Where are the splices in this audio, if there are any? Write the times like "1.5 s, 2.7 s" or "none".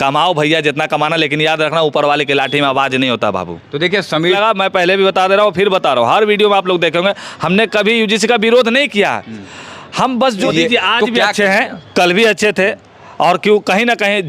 4.4 s, 10.4 s